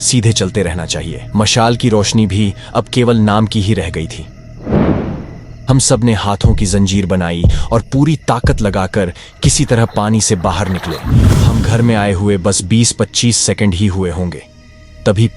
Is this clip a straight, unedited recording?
no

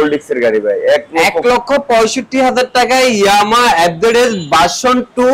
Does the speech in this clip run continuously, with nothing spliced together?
yes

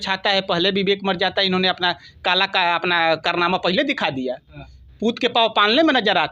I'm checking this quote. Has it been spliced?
no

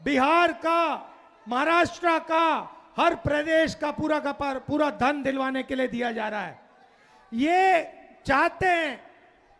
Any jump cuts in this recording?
no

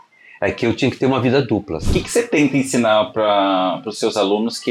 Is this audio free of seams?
no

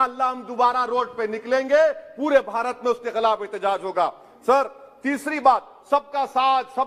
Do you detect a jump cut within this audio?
no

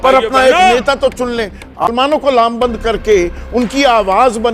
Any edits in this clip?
yes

